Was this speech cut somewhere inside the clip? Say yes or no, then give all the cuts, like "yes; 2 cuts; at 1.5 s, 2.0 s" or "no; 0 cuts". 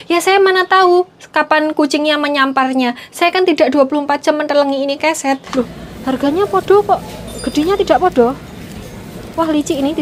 yes; 1 cut; at 5.5 s